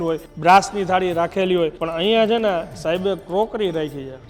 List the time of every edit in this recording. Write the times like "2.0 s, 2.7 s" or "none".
1.8 s